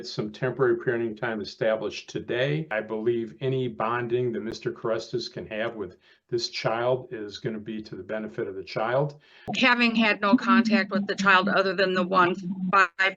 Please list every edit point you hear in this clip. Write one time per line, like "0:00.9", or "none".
0:02.7
0:09.5